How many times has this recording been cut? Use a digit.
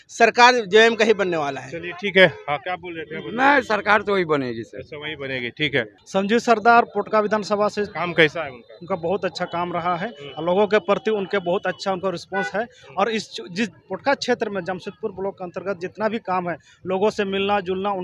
0